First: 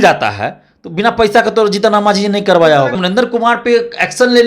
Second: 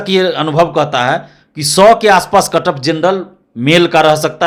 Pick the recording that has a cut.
first; 1 cut; at 3.0 s

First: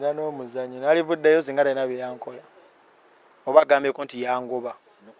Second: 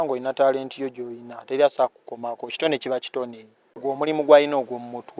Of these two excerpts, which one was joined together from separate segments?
second; 1 cut; at 3.7 s

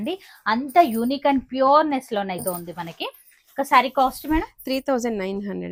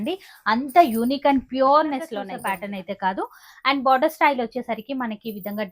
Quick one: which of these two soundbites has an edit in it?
second; 1 cut; at 2.3 s

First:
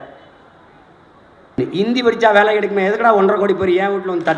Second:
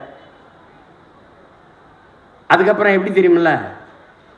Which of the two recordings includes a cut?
first; 1 cut; at 1.6 s

